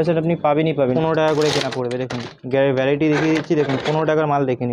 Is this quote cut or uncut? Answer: cut